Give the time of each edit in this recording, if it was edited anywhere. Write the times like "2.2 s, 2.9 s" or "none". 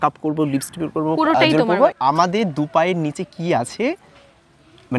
1.9 s